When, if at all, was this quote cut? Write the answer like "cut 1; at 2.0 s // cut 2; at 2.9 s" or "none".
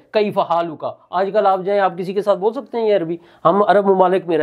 none